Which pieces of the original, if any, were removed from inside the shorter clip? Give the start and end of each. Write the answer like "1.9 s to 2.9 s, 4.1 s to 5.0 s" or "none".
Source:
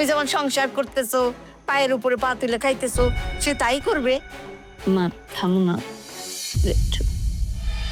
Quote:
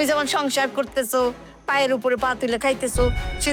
none